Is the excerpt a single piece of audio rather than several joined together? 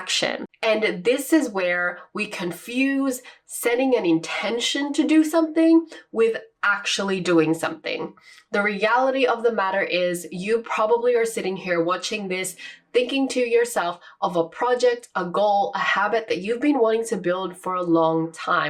yes; 0 cuts

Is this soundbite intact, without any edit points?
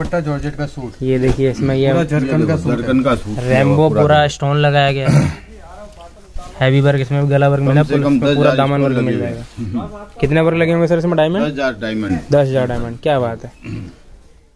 yes; 0 cuts

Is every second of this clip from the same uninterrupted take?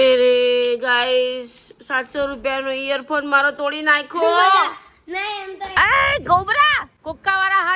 no; 2 cuts; at 5.6 s, 6.9 s

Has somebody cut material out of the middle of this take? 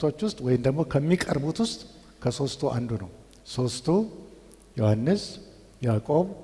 no; 0 cuts

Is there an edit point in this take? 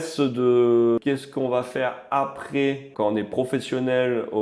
yes; 2 cuts; at 1.0 s, 2.9 s

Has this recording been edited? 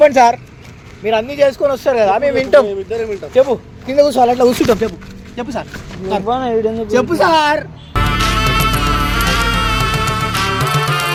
no; 0 cuts

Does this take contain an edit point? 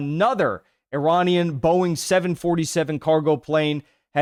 no; 0 cuts

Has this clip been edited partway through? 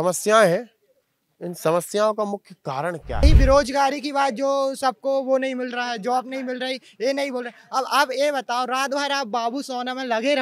yes; 1 cut; at 3.2 s

